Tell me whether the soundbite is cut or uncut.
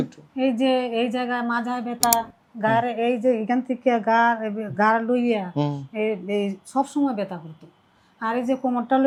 uncut